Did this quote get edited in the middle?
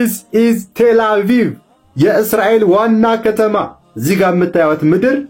no; 0 cuts

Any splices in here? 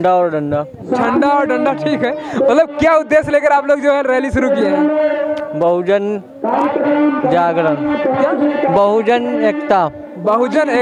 no; 0 cuts

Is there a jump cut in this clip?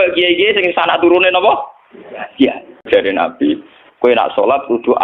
yes; 1 cut; at 2.9 s

